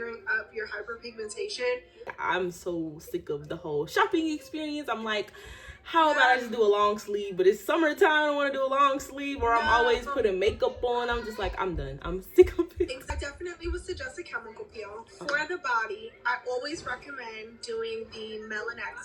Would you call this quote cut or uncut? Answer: uncut